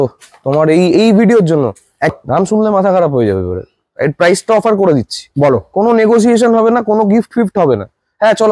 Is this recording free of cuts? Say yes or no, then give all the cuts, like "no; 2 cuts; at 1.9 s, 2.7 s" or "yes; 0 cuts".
no; 1 cut; at 2.1 s